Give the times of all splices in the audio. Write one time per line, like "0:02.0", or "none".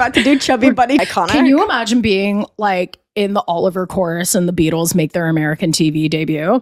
0:01.1